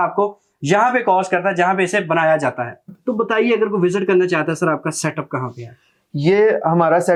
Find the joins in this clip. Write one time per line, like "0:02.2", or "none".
none